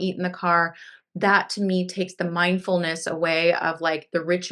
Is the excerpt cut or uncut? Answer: uncut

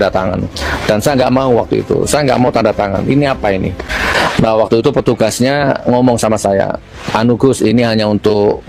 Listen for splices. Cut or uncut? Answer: uncut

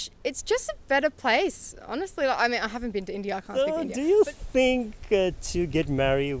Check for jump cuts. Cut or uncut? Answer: cut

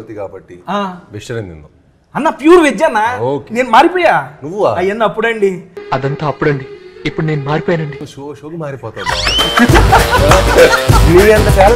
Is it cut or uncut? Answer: uncut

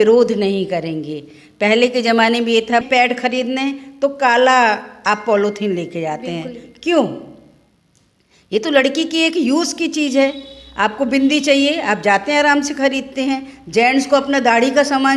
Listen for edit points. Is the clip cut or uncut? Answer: cut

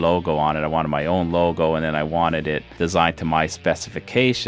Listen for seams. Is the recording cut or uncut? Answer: uncut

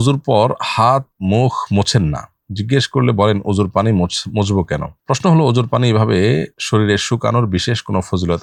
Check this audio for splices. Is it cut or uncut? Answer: uncut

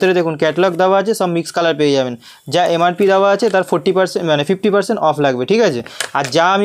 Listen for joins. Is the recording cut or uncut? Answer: uncut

